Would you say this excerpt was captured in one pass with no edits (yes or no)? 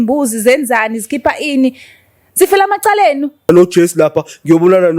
no